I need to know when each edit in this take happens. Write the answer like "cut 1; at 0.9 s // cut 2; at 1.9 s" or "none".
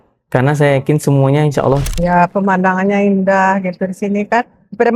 cut 1; at 1.9 s